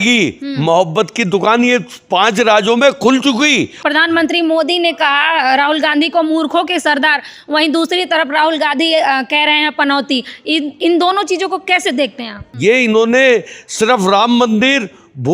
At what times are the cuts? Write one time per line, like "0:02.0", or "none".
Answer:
0:03.8
0:12.4